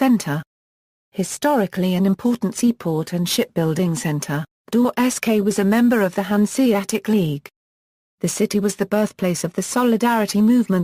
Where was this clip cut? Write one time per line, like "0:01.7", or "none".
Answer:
none